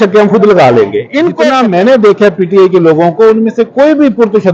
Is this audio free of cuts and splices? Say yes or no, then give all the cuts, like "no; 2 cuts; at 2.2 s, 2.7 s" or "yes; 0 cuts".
no; 1 cut; at 1.4 s